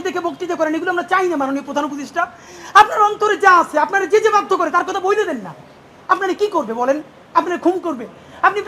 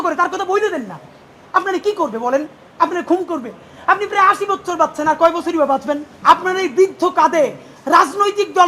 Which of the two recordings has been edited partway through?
second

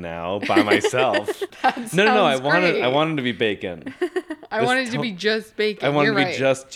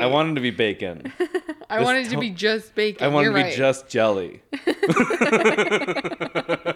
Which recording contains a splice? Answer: first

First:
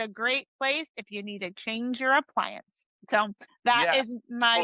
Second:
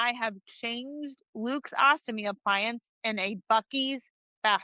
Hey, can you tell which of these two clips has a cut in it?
first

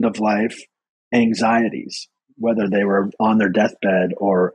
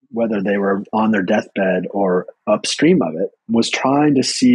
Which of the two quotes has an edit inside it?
second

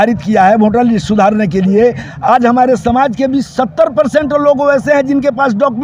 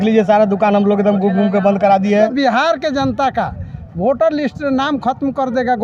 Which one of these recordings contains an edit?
second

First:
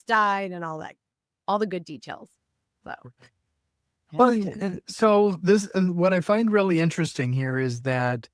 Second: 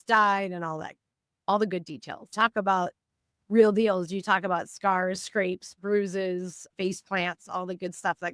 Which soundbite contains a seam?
second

